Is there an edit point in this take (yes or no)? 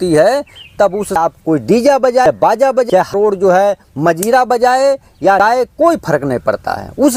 no